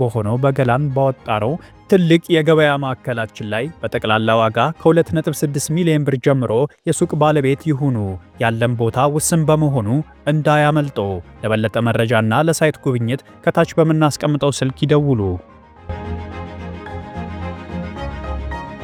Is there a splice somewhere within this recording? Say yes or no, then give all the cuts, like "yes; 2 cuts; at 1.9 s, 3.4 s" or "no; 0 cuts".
no; 0 cuts